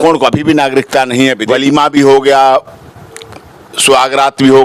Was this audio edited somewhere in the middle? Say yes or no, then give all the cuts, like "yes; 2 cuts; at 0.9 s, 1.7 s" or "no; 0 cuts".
yes; 1 cut; at 1.4 s